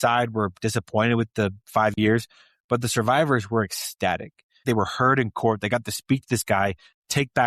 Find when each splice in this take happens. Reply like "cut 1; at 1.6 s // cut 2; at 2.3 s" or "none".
cut 1; at 4.6 s